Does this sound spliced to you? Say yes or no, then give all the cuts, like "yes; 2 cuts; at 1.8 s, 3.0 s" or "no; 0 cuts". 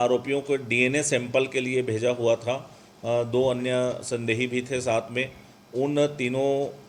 no; 0 cuts